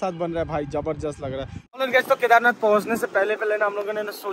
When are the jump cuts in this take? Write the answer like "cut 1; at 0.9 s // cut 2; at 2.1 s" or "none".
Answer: cut 1; at 1.8 s